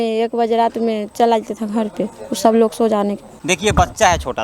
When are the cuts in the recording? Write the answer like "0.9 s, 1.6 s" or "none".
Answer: 3.3 s

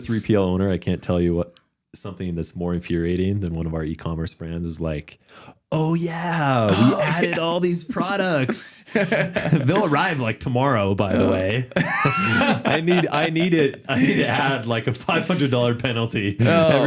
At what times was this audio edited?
none

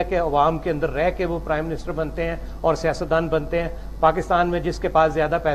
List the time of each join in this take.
none

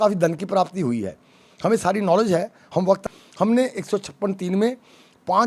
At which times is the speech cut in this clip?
3.0 s

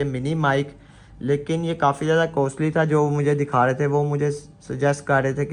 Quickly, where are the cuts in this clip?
none

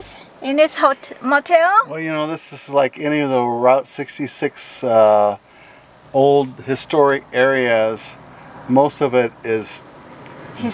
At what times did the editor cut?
none

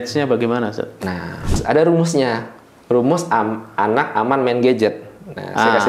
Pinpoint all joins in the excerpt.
1.6 s

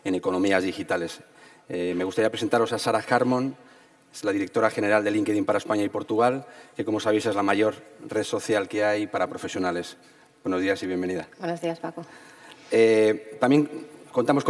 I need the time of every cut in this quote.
5.2 s

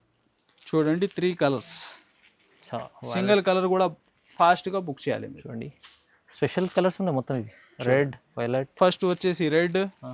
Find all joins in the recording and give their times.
none

